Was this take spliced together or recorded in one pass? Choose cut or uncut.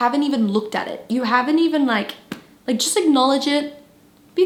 uncut